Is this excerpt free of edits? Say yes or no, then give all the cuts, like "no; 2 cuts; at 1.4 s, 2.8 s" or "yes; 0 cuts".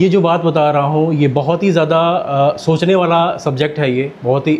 yes; 0 cuts